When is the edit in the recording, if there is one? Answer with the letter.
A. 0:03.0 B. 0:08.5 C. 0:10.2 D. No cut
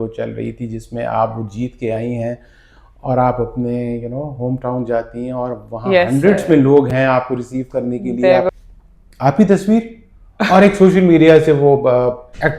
B